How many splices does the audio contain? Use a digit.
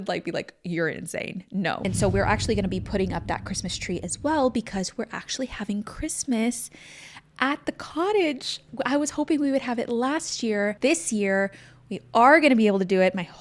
3